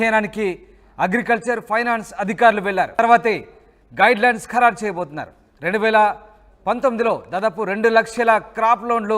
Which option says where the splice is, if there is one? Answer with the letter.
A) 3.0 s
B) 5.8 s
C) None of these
A